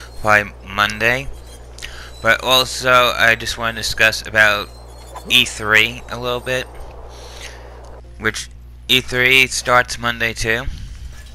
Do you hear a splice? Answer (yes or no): no